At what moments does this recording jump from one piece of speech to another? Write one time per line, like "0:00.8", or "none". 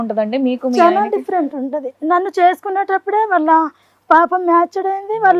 none